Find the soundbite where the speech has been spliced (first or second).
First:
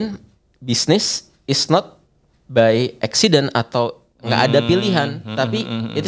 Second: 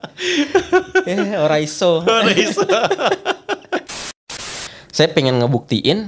second